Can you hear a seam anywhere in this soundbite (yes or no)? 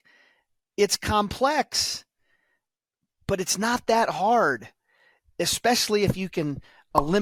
no